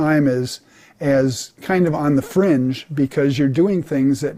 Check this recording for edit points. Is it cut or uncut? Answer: uncut